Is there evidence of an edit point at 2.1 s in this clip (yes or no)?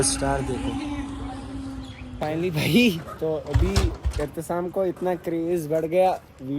yes